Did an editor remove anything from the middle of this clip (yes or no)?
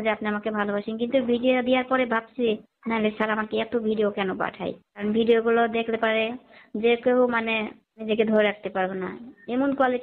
yes